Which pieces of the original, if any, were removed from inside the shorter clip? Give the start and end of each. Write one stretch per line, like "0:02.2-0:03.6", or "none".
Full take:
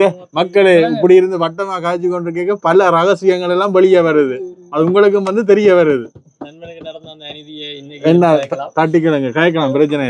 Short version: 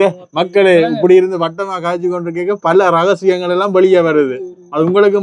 none